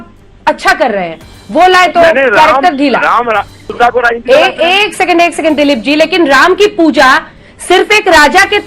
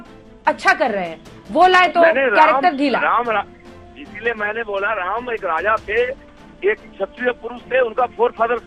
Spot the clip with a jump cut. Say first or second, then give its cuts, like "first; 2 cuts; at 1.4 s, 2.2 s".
first; 1 cut; at 3.7 s